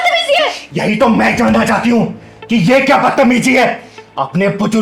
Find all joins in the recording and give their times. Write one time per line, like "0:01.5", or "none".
none